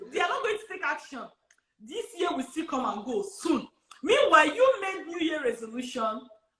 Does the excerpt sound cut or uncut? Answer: uncut